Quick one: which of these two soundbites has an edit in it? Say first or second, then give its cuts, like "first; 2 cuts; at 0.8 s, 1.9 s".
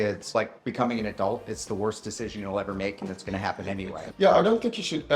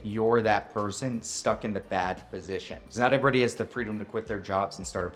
first; 1 cut; at 4.0 s